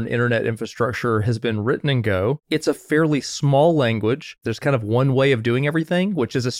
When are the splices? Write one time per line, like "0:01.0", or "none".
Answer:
0:02.4
0:04.5